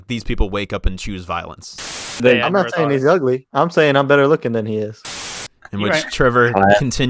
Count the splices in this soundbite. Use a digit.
2